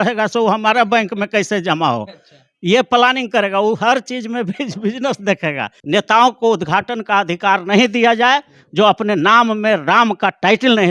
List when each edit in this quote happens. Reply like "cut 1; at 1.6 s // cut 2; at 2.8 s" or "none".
cut 1; at 5.7 s